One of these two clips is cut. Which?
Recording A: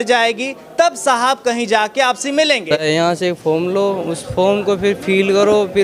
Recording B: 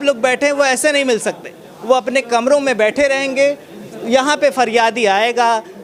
A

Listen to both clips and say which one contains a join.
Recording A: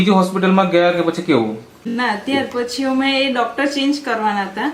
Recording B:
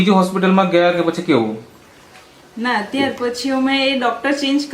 A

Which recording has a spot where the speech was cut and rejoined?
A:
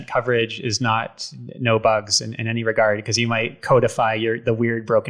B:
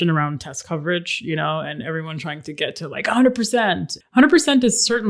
B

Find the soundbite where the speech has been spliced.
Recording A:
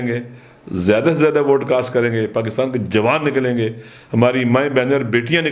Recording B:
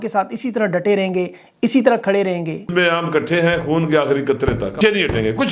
B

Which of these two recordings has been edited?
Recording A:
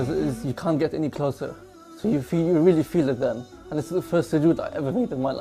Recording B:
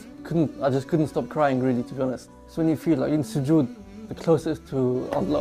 B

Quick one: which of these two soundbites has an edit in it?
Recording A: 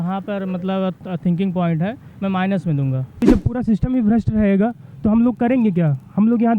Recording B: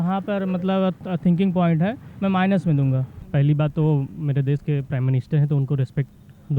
A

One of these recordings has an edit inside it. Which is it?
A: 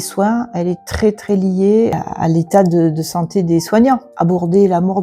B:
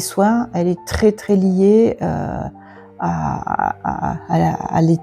A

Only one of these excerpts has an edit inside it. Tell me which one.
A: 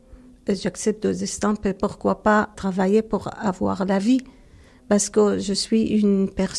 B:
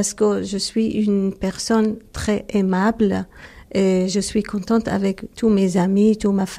A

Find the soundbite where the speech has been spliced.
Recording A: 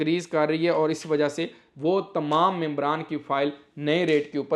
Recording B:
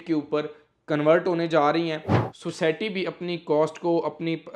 B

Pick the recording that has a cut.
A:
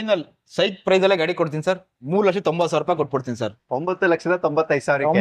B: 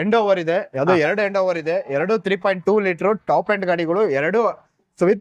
A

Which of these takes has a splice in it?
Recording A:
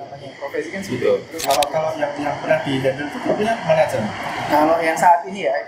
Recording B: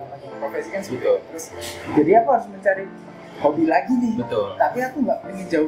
A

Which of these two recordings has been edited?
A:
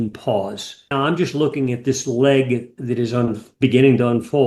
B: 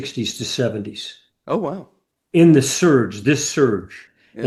A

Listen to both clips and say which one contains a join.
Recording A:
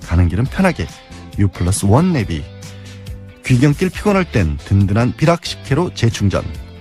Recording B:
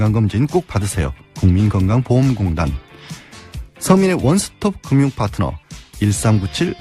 B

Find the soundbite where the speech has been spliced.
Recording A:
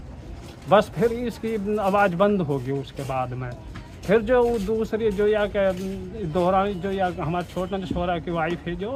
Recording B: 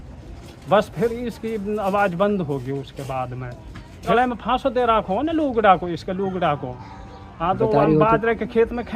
B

